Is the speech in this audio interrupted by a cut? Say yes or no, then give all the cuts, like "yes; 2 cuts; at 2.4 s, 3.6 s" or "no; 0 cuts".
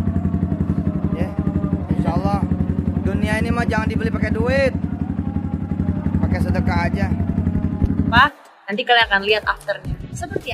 yes; 1 cut; at 8.2 s